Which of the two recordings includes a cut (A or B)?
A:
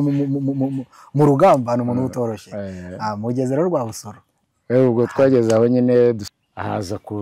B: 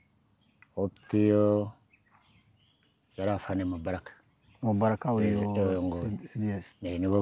A